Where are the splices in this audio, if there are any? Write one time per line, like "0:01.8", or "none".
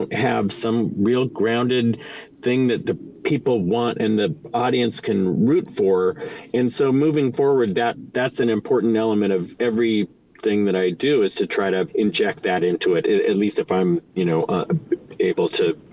0:08.0
0:09.5
0:11.9

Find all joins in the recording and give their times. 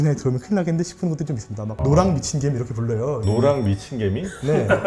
none

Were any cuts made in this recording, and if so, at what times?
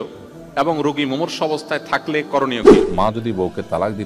0:02.6

